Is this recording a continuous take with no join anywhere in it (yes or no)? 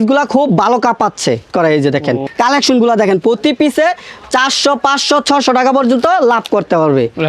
no